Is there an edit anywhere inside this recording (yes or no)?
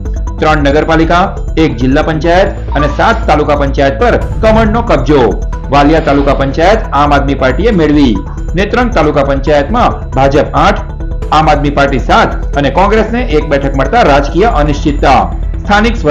no